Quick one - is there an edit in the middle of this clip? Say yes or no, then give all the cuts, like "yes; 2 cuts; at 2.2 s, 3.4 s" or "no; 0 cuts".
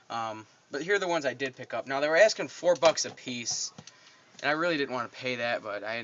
no; 0 cuts